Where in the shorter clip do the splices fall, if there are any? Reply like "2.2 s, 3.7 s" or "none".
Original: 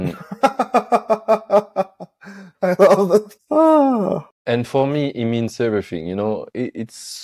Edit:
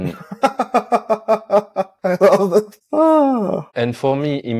1.9 s, 3.7 s